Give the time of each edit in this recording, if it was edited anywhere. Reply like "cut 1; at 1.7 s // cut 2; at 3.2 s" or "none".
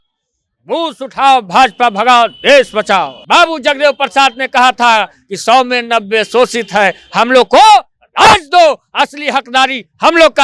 cut 1; at 3.2 s